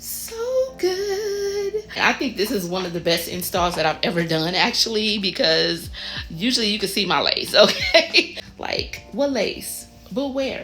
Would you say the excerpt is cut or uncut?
cut